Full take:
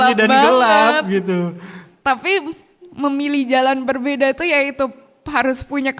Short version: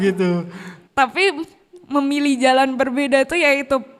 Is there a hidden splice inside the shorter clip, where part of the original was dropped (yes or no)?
no